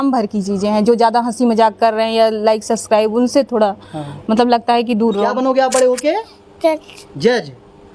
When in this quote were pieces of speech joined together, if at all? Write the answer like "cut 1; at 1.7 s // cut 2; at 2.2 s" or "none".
cut 1; at 5.3 s